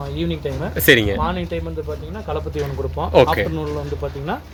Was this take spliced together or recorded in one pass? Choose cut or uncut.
uncut